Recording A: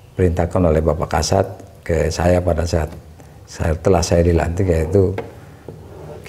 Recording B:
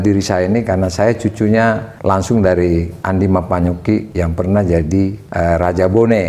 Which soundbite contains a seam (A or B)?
B